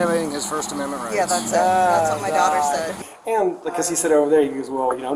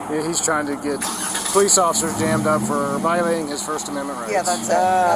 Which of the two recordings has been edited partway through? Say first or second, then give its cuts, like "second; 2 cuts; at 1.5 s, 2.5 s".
first; 1 cut; at 2.9 s